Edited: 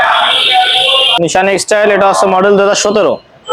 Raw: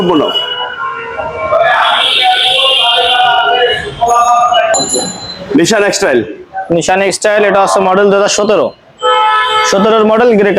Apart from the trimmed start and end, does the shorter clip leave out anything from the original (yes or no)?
yes